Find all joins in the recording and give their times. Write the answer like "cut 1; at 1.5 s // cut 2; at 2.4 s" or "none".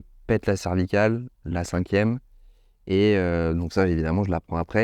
none